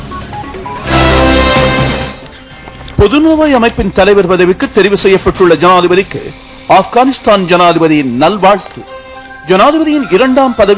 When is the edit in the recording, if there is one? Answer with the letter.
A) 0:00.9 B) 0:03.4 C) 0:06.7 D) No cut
A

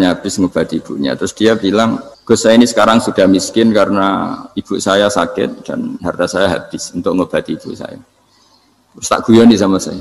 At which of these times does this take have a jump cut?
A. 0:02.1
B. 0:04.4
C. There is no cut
A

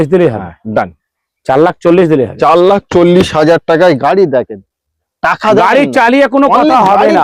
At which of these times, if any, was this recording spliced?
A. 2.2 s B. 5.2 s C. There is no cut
C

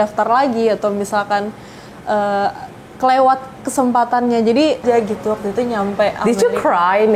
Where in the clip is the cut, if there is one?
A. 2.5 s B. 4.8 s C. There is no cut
B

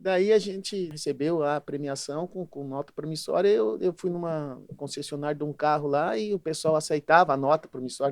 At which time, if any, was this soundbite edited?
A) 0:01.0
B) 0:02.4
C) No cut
A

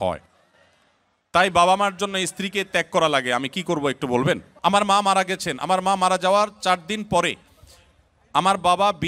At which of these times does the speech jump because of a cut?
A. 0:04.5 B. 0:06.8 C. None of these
A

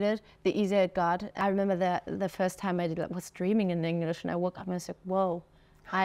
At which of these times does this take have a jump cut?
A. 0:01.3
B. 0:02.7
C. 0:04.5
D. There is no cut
A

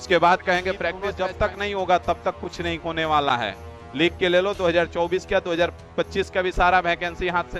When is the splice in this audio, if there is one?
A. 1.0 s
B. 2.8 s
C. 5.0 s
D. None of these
A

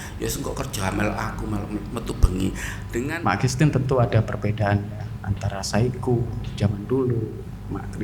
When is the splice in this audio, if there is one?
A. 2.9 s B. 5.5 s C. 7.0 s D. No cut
A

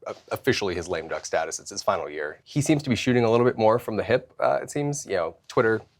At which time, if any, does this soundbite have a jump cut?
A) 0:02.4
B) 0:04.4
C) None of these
A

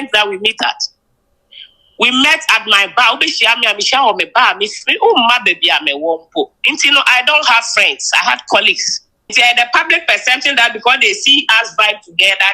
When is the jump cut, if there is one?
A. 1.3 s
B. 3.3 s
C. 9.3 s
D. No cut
C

